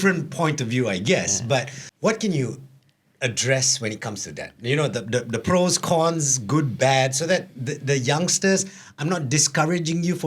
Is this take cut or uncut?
cut